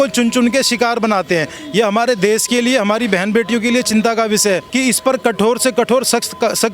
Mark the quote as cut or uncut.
cut